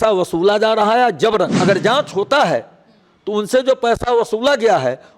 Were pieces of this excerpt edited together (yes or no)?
yes